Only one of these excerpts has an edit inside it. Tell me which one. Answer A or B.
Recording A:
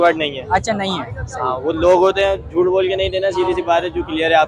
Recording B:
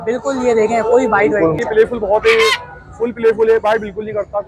B